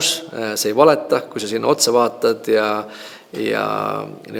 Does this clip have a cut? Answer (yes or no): no